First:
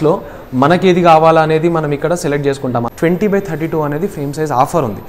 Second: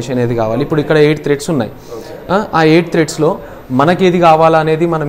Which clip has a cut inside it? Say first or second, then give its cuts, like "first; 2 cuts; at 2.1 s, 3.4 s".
first; 1 cut; at 2.9 s